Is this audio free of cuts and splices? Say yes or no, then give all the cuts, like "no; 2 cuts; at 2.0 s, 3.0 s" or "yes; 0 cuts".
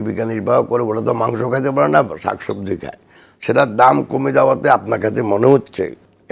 yes; 0 cuts